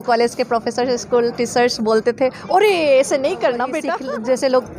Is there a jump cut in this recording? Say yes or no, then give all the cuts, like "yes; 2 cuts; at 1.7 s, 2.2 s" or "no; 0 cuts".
yes; 1 cut; at 3.8 s